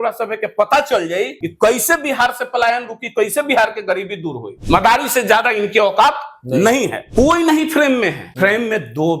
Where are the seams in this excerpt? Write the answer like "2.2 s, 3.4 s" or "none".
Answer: 1.4 s, 4.5 s, 7.0 s, 8.2 s